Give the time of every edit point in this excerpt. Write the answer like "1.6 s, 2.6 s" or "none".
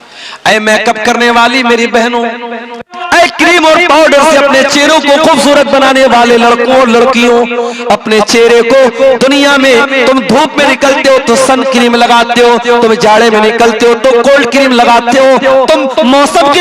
2.9 s